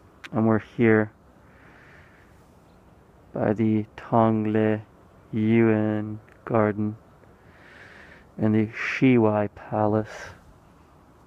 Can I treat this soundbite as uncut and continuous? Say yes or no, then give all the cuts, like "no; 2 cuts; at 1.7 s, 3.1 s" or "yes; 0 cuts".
no; 1 cut; at 8.2 s